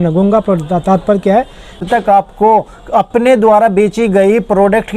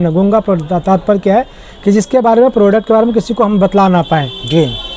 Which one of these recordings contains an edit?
first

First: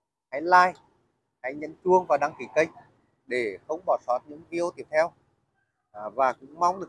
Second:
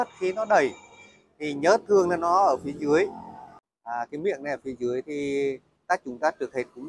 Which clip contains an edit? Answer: second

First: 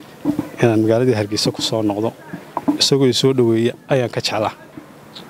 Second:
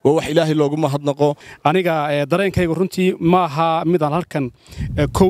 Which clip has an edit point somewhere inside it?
second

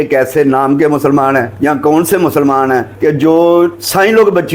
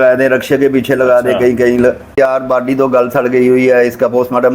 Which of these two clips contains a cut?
second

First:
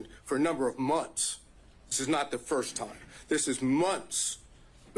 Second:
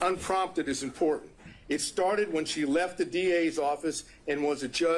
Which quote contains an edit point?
first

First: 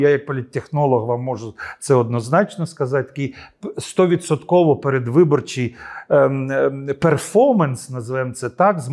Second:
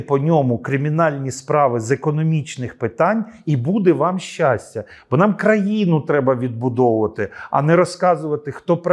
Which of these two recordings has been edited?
second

